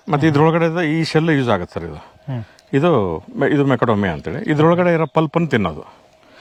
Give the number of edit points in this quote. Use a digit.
0